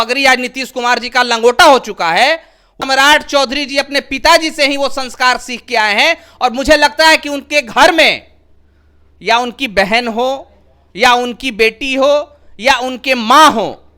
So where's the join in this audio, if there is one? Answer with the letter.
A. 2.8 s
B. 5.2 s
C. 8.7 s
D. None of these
A